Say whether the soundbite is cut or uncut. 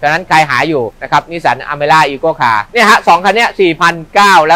cut